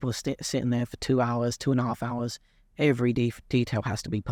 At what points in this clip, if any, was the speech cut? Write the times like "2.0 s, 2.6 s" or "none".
none